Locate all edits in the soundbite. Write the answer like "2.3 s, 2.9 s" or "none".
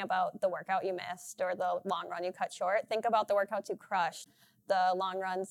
4.3 s